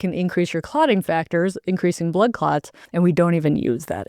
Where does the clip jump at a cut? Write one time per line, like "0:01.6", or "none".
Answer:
0:02.8